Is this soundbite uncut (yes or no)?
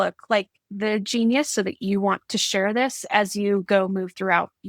yes